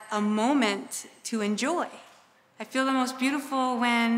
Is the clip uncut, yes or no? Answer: yes